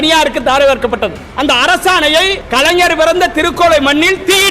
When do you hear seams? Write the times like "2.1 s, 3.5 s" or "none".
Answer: 1.2 s, 2.4 s